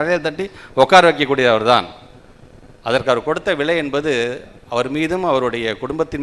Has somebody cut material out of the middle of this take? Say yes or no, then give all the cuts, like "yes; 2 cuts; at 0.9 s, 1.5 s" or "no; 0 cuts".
no; 0 cuts